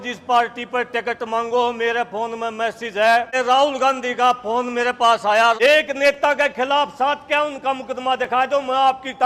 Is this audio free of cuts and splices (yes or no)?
no